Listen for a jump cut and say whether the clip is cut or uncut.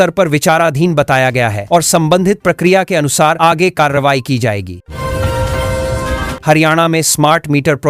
cut